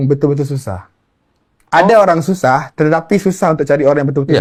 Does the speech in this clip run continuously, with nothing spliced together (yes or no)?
yes